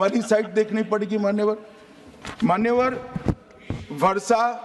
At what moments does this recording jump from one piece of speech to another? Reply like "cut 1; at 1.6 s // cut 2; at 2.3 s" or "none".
none